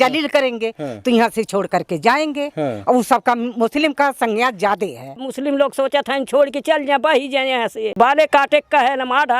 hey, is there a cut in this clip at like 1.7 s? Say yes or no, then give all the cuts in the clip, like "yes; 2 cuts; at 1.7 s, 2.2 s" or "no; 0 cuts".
no; 2 cuts; at 5.3 s, 7.9 s